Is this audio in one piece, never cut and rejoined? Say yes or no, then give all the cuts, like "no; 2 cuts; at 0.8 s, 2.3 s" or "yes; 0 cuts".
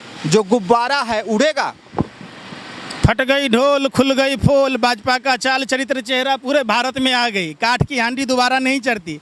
yes; 0 cuts